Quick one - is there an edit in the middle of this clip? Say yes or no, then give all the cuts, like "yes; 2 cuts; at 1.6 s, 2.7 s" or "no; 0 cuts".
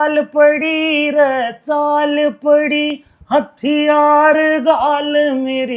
no; 0 cuts